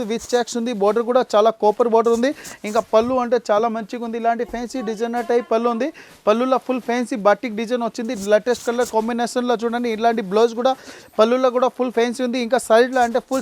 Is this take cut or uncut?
uncut